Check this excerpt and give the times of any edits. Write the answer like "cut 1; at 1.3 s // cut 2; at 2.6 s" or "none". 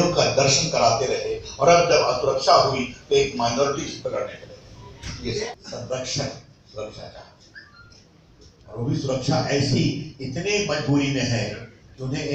cut 1; at 5.6 s

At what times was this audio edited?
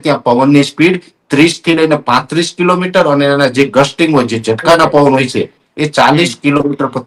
none

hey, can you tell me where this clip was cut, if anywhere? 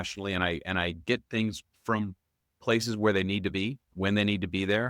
cut 1; at 1.7 s // cut 2; at 3.8 s

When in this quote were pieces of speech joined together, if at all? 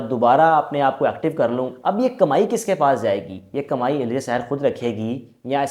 cut 1; at 1.7 s

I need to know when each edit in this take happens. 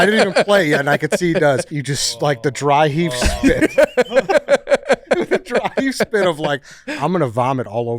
cut 1; at 1.7 s

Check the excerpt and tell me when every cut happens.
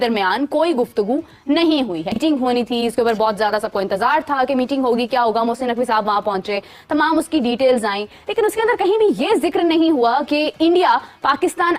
none

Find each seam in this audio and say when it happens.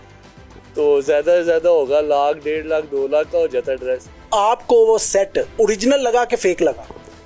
cut 1; at 4.1 s // cut 2; at 5.6 s

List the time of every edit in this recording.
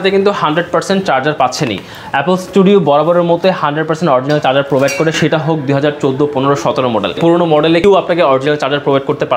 none

